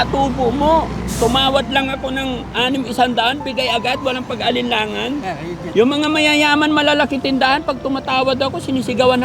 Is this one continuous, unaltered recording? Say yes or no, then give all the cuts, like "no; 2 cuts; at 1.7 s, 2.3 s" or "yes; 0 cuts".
no; 1 cut; at 5.5 s